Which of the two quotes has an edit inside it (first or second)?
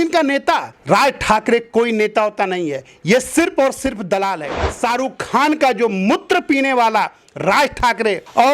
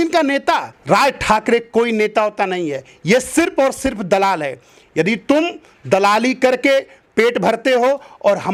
first